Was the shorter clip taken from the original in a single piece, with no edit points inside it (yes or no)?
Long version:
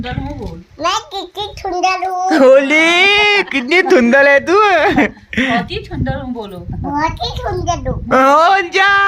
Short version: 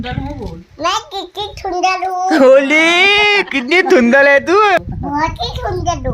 no